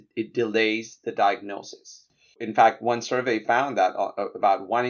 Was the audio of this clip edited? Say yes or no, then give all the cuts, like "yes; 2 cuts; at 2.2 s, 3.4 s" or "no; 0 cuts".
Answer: yes; 1 cut; at 2.4 s